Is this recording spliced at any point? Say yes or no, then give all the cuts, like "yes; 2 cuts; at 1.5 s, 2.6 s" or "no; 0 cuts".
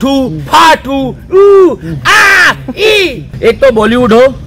yes; 1 cut; at 3.3 s